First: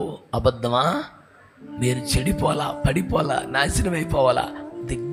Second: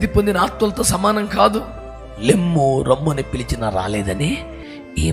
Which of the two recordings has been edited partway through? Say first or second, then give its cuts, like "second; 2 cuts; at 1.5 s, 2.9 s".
second; 1 cut; at 2.2 s